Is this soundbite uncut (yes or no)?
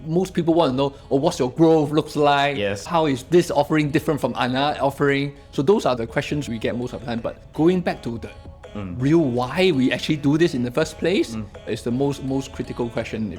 no